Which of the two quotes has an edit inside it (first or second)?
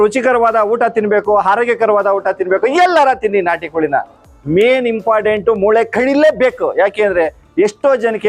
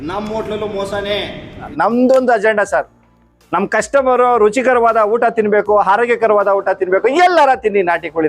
second